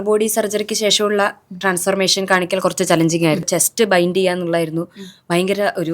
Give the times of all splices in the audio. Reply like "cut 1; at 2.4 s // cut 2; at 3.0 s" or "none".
cut 1; at 3.4 s